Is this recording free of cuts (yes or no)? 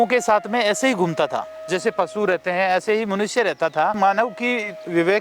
no